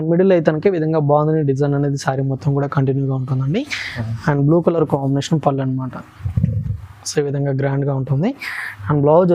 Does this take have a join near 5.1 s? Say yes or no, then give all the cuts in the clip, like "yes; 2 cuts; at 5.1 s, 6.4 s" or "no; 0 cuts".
no; 0 cuts